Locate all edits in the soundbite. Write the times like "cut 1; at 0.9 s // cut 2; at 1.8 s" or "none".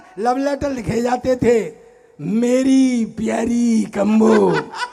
none